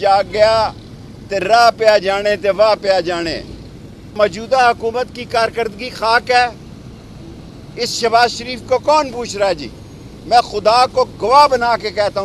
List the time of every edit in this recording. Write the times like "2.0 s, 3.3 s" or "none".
4.1 s